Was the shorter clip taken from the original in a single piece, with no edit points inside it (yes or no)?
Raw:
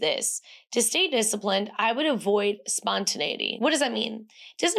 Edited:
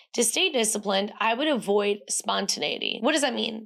yes